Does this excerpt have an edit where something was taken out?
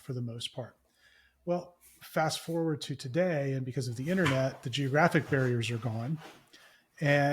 no; 0 cuts

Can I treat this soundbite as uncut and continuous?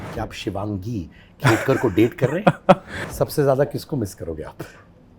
no; 1 cut; at 3.1 s

